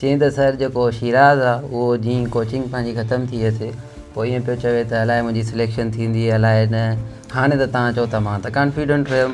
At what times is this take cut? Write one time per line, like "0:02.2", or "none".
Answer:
none